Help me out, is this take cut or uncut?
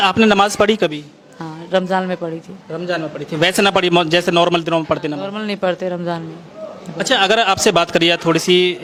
uncut